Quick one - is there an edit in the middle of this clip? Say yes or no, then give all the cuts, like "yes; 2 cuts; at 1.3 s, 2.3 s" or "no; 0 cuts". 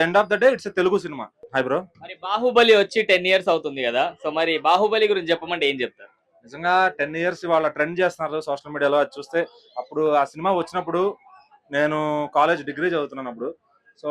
yes; 1 cut; at 1.3 s